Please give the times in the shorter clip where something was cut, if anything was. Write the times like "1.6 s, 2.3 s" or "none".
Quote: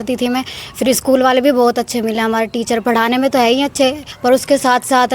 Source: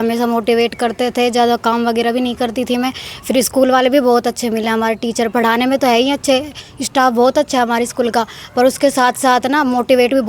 4.1 s